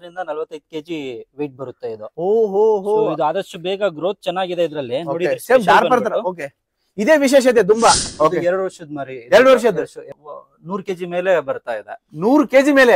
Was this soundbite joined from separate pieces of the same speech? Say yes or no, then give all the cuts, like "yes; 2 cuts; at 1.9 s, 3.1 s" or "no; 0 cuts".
yes; 2 cuts; at 8.1 s, 10.1 s